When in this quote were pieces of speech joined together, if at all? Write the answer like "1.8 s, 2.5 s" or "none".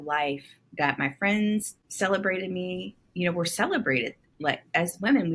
1.8 s